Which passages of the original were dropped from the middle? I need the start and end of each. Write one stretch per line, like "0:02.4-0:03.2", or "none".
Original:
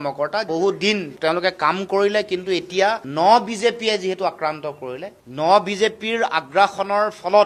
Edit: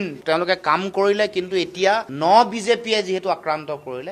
none

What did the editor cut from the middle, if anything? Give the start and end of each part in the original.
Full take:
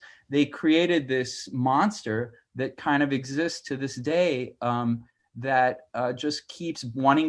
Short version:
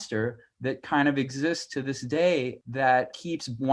0:04.7-0:06.1

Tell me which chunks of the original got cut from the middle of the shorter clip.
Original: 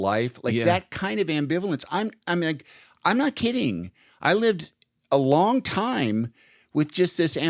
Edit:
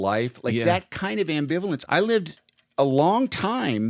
0:01.8-0:04.2

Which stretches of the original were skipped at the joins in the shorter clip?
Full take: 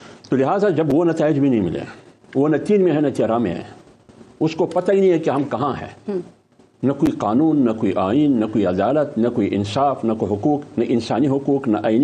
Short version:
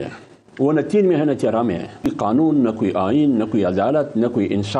0:03.8-0:07.1

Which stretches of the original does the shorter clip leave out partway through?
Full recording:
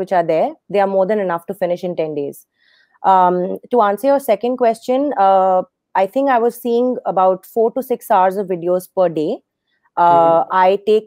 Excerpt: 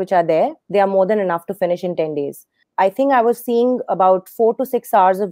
0:02.6-0:05.8

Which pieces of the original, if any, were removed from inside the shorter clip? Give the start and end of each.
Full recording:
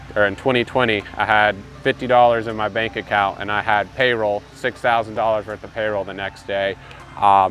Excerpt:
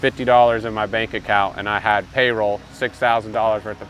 none

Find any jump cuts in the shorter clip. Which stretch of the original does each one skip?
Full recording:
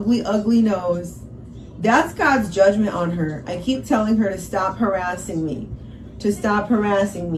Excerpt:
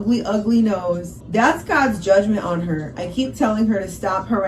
0:01.1-0:01.6

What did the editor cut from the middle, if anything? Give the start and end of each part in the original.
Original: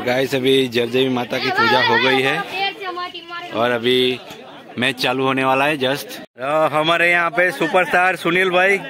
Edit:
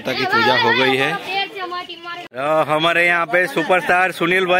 0:03.4-0:06.2

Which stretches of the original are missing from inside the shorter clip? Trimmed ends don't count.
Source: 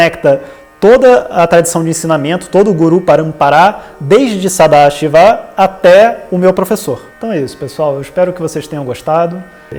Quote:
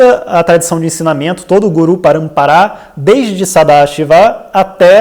none

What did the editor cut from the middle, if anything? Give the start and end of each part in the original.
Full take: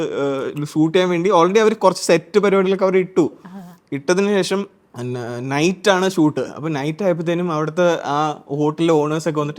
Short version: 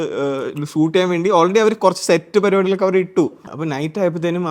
0:03.5-0:06.5

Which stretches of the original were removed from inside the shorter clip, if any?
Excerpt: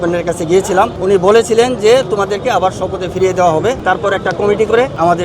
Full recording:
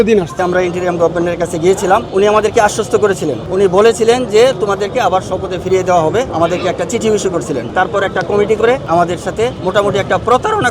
0:02.1-0:03.4
0:06.3-0:07.7

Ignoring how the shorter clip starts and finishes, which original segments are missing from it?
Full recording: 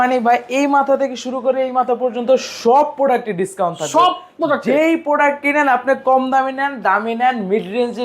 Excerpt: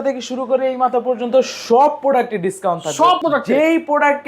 0:04.1-0:04.4

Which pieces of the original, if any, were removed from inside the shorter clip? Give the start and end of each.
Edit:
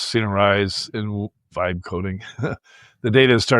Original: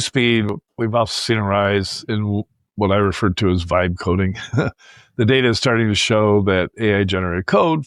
0:02.6-0:03.6

